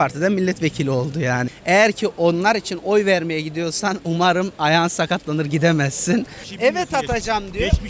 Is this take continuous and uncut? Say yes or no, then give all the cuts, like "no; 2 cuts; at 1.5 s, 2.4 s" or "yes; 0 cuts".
no; 2 cuts; at 1.5 s, 6.4 s